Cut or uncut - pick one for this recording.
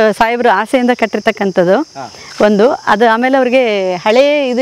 uncut